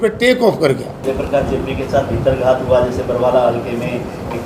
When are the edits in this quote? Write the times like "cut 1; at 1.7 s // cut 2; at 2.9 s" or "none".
cut 1; at 1.0 s

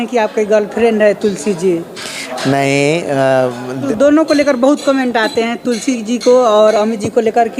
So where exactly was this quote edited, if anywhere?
cut 1; at 3.9 s

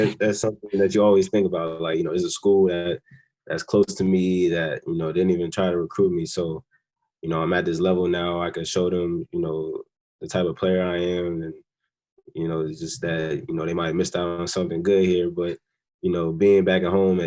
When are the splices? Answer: none

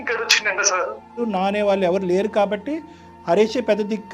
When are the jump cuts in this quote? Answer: cut 1; at 1.2 s

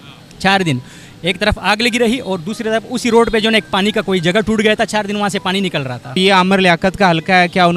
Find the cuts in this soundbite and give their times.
cut 1; at 6.2 s

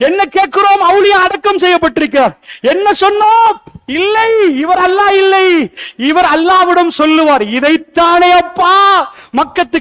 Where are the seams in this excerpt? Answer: none

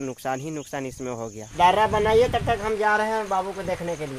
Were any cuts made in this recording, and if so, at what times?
cut 1; at 1.4 s

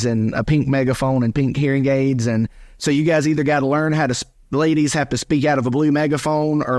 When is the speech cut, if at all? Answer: cut 1; at 1.6 s

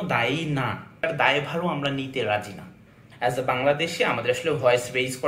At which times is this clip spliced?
cut 1; at 1.0 s // cut 2; at 3.0 s

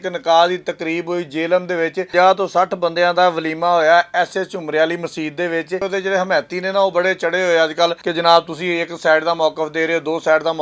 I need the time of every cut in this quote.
cut 1; at 2.0 s // cut 2; at 5.8 s // cut 3; at 8.0 s

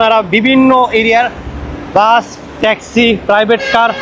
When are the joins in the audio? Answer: none

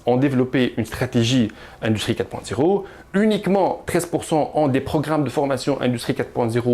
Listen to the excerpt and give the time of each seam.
none

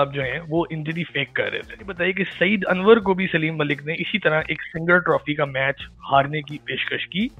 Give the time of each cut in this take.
cut 1; at 2.0 s

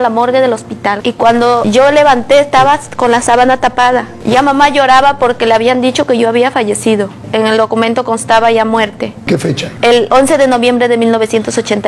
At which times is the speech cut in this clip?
cut 1; at 0.9 s // cut 2; at 9.2 s

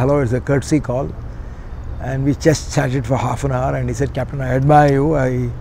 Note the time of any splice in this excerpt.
none

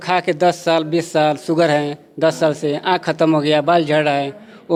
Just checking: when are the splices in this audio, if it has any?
none

